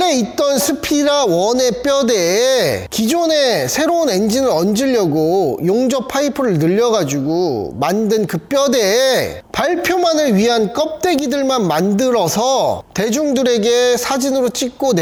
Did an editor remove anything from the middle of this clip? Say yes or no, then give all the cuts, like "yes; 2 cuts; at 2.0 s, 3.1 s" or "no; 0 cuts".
no; 0 cuts